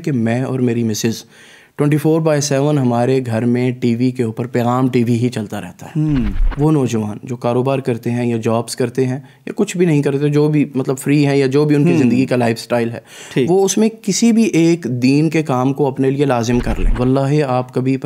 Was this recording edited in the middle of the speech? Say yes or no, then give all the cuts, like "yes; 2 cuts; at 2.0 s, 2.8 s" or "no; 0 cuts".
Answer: yes; 2 cuts; at 6.4 s, 16.8 s